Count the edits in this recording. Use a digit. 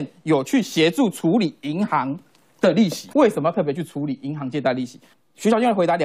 2